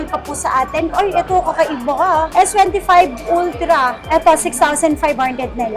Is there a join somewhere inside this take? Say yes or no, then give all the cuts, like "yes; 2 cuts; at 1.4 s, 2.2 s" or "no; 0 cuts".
yes; 3 cuts; at 0.9 s, 2.3 s, 4.0 s